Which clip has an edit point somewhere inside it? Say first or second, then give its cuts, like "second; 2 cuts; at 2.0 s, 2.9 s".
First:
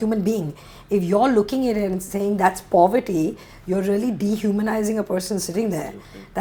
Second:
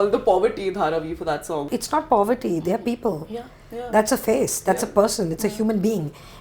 second; 1 cut; at 1.7 s